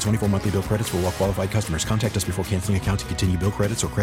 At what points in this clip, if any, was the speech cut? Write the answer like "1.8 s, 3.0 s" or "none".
none